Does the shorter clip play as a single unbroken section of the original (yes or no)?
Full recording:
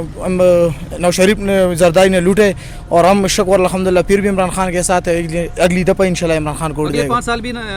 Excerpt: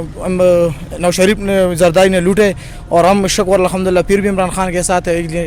yes